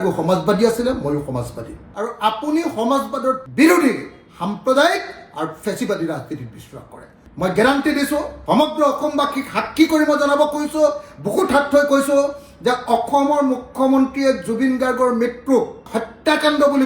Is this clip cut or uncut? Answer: cut